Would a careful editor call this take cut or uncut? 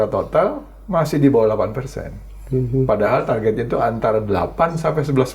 uncut